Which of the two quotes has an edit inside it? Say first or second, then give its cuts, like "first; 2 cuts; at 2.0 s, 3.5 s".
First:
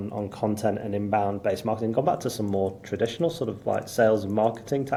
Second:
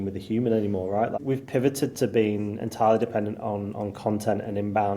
second; 1 cut; at 1.2 s